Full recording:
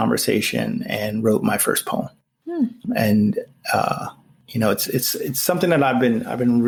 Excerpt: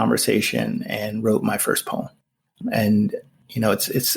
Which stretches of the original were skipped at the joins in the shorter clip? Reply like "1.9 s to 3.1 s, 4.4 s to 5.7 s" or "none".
2.5 s to 2.7 s, 3.5 s to 4.3 s